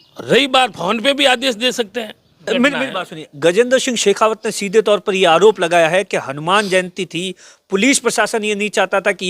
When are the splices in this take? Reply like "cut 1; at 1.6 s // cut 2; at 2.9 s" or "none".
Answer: cut 1; at 2.5 s